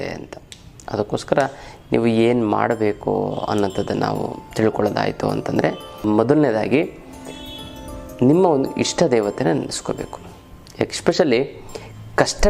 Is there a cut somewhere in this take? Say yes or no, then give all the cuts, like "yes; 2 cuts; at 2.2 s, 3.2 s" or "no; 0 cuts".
yes; 1 cut; at 6.0 s